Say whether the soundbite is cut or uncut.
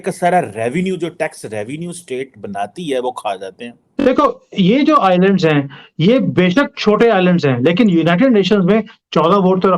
cut